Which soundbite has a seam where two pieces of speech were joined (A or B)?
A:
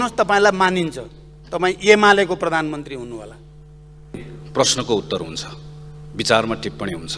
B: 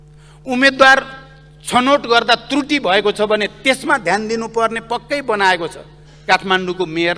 A